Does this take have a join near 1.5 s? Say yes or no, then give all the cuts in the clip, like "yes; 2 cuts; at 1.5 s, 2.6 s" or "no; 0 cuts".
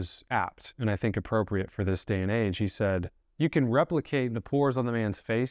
no; 1 cut; at 3.2 s